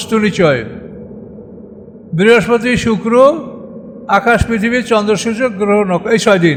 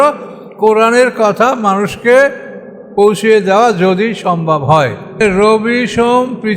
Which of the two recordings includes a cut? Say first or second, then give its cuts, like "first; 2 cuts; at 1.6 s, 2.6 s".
second; 1 cut; at 5.2 s